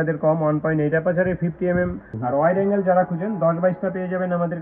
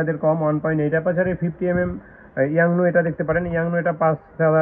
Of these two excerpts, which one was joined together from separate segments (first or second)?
first